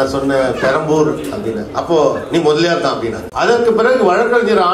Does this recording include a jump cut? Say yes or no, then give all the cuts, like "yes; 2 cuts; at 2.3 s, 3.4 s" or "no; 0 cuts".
yes; 1 cut; at 3.2 s